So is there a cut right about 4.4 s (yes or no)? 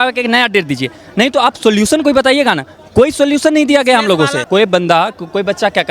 yes